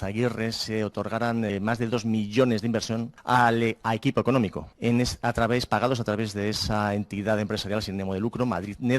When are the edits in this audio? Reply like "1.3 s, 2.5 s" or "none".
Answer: 3.1 s, 4.6 s